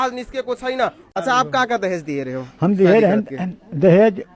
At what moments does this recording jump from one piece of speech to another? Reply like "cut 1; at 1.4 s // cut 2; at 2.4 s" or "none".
cut 1; at 1.1 s